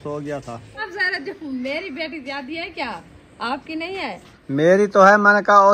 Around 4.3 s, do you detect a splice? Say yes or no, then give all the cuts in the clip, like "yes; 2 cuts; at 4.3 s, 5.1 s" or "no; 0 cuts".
yes; 2 cuts; at 0.8 s, 4.3 s